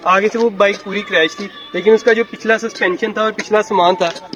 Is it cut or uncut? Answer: uncut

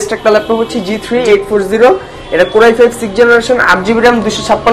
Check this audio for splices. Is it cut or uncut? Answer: uncut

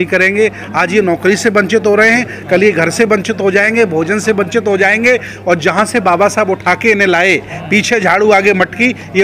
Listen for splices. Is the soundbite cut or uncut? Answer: uncut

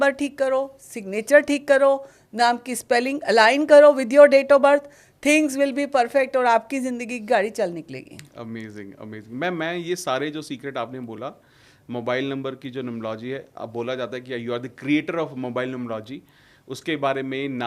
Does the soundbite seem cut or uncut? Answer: uncut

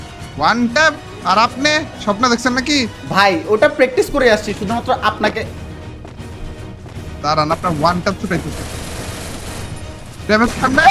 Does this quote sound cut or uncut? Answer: uncut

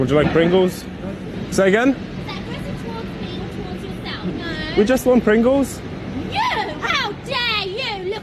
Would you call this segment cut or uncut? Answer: uncut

